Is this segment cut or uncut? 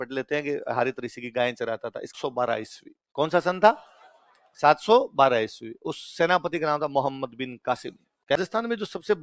cut